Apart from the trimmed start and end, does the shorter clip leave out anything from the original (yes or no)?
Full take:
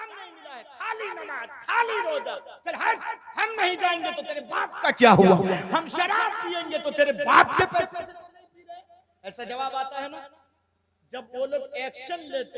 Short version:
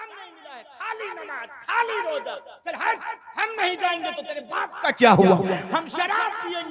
no